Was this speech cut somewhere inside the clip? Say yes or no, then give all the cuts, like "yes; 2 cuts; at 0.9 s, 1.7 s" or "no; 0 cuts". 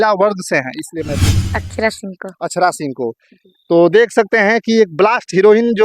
yes; 1 cut; at 1.3 s